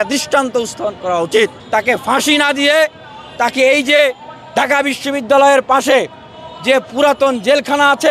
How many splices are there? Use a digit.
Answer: 1